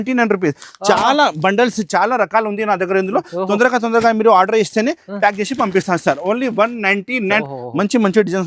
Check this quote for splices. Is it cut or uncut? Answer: cut